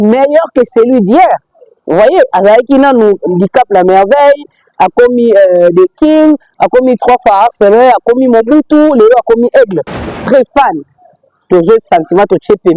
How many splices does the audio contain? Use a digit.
1